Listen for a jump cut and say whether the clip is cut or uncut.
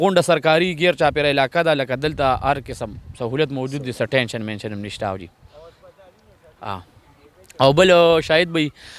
uncut